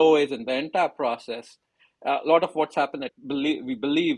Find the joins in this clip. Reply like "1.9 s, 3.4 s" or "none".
none